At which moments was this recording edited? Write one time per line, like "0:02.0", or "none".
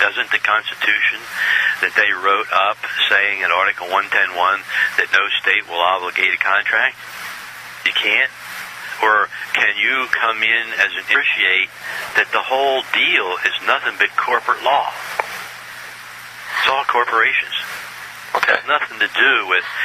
none